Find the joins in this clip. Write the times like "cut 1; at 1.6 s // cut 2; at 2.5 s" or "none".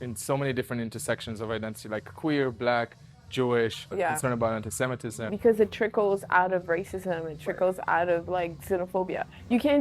cut 1; at 3.9 s // cut 2; at 5.3 s